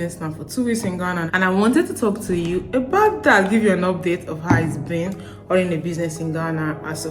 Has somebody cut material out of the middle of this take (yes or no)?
yes